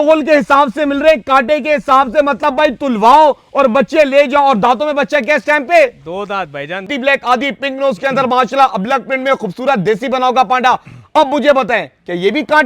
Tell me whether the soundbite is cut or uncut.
cut